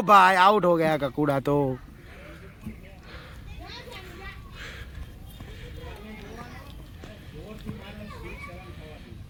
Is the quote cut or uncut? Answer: uncut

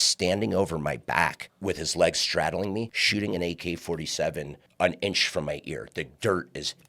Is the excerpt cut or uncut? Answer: cut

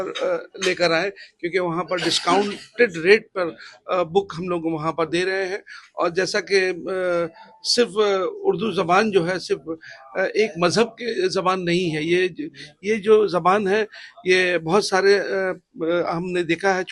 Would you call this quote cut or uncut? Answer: uncut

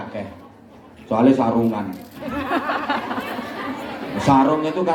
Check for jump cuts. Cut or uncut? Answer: uncut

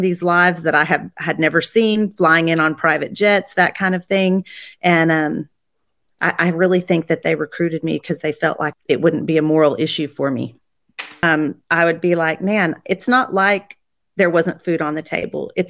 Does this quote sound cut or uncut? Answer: cut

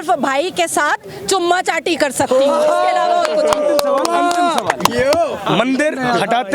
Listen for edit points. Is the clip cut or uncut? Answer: uncut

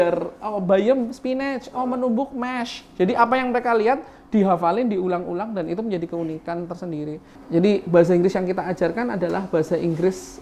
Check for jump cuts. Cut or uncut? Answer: cut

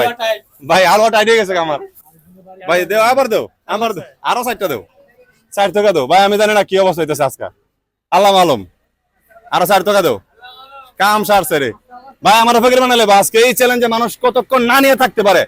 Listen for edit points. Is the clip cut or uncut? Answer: uncut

